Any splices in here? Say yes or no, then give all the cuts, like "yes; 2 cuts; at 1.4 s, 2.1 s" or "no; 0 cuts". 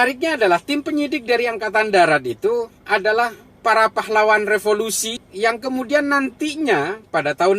yes; 1 cut; at 5.2 s